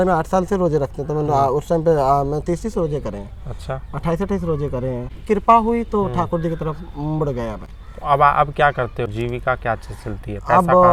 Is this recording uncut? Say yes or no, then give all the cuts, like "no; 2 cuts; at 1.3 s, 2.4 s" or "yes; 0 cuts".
yes; 0 cuts